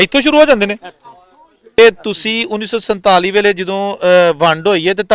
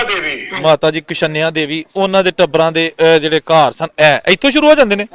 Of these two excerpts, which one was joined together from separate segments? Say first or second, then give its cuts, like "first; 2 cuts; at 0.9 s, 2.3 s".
first; 1 cut; at 1.8 s